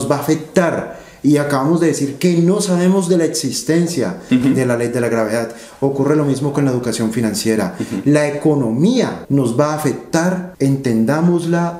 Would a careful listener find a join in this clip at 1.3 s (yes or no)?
no